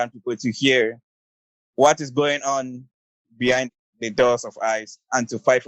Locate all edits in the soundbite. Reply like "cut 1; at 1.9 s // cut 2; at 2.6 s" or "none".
cut 1; at 3.8 s